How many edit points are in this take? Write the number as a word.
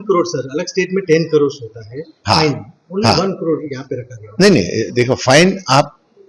zero